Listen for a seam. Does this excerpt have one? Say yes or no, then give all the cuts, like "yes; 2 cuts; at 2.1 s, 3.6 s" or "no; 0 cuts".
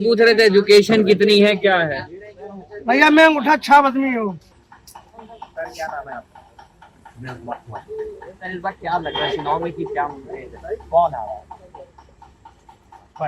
no; 0 cuts